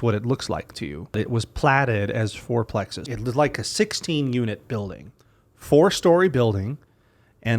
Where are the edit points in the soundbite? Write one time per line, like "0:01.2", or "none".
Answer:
0:01.2
0:03.1